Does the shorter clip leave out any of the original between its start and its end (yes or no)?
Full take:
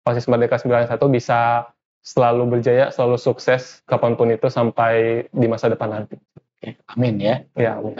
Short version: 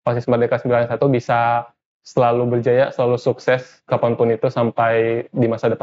no